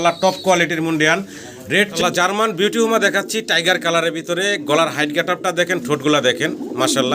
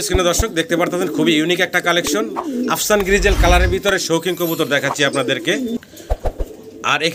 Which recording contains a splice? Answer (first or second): first